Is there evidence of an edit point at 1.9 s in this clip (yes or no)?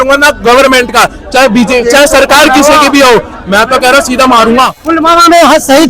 no